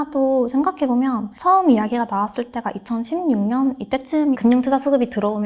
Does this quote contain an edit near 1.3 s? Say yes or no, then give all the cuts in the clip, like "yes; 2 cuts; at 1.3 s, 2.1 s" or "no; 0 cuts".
yes; 2 cuts; at 1.3 s, 4.4 s